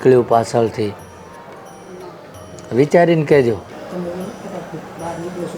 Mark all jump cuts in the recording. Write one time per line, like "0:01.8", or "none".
none